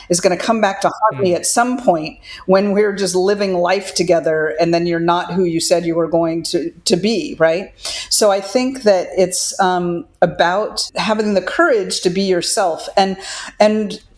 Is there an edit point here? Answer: yes; 1 cut; at 10.9 s

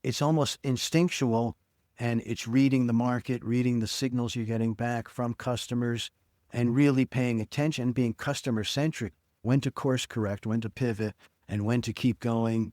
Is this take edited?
yes; 1 cut; at 9.4 s

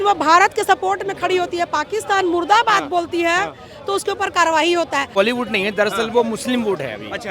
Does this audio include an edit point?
yes; 1 cut; at 5.2 s

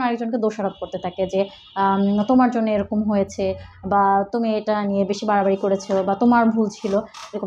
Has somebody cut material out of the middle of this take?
no; 0 cuts

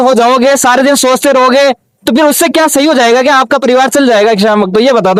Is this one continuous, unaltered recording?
yes; 0 cuts

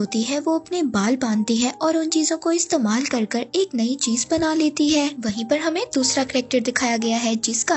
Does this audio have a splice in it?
no; 0 cuts

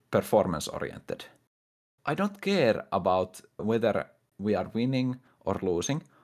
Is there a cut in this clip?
yes; 2 cuts; at 1.9 s, 3.6 s

